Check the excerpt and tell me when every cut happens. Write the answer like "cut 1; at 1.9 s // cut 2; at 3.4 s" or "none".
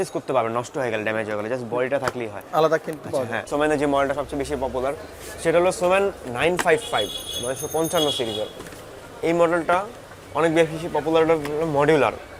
cut 1; at 3.5 s